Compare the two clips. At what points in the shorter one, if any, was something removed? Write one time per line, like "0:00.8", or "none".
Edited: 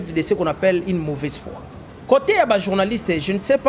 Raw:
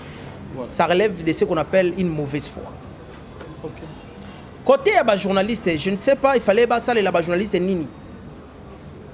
0:02.1